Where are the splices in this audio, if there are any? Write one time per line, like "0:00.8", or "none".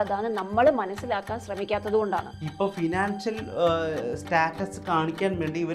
0:02.4